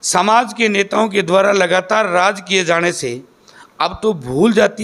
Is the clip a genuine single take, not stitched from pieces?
yes; 0 cuts

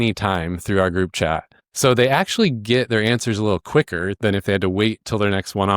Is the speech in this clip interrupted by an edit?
no; 0 cuts

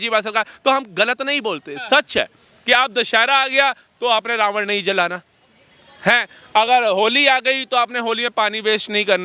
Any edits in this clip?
no; 0 cuts

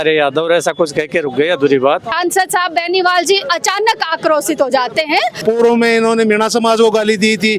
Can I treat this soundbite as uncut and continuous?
no; 2 cuts; at 2.1 s, 5.3 s

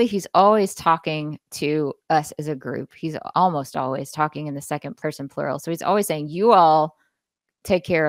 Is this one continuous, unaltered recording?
no; 2 cuts; at 3.2 s, 4.9 s

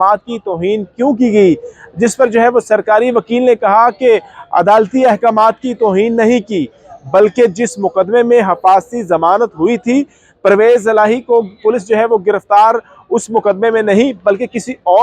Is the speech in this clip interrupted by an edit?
no; 0 cuts

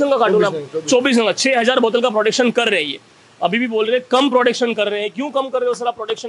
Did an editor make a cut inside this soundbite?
no; 0 cuts

